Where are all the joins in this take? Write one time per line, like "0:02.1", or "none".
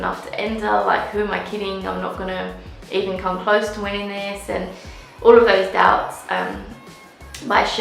none